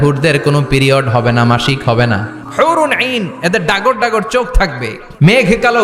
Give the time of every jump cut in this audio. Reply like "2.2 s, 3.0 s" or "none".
2.4 s, 4.5 s